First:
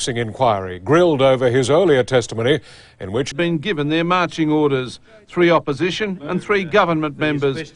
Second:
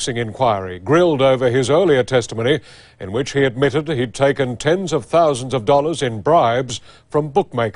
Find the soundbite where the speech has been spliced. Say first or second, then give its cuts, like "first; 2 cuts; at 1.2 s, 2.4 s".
second; 1 cut; at 3.3 s